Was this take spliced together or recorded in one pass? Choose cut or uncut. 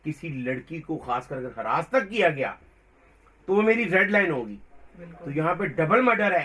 uncut